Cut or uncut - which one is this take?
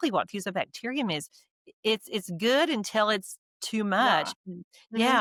uncut